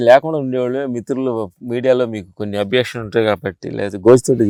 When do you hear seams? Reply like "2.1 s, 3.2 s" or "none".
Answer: none